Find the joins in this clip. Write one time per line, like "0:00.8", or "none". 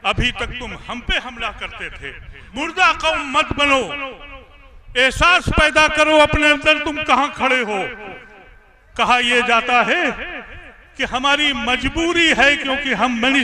0:02.5